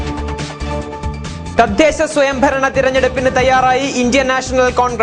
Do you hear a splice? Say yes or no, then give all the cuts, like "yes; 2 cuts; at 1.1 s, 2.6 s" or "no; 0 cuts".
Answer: yes; 1 cut; at 1.4 s